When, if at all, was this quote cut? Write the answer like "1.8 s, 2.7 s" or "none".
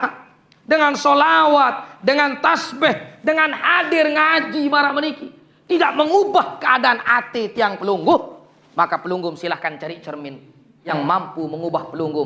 10.8 s